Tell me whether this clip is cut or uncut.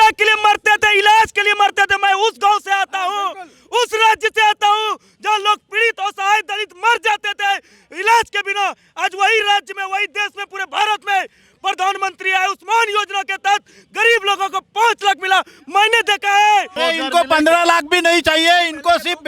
cut